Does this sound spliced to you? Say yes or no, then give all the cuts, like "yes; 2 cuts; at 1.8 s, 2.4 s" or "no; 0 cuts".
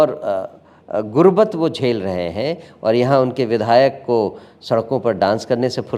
no; 0 cuts